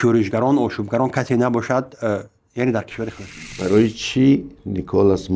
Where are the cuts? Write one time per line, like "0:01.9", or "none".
0:03.5